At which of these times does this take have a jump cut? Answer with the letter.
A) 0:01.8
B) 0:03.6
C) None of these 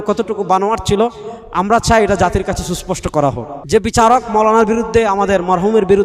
B